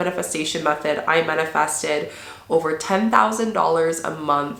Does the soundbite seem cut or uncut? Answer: uncut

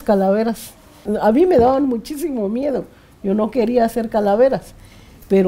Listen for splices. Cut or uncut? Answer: cut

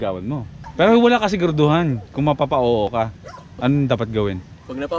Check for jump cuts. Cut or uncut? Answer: cut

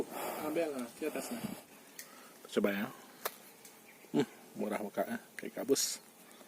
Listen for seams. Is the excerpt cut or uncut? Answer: cut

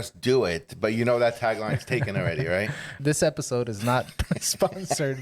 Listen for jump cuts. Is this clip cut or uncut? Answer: cut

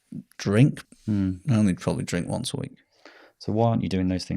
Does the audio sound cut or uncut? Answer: cut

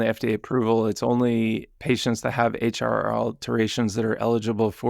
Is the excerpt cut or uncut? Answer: uncut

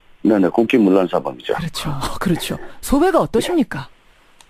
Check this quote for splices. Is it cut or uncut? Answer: uncut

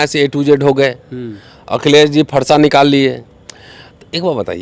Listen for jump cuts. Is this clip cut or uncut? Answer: uncut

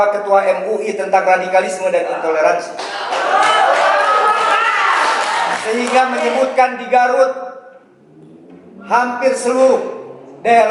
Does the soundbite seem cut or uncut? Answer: uncut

